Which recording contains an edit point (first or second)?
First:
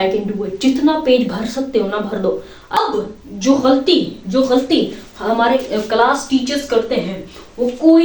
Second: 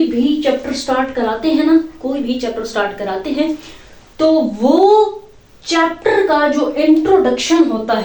first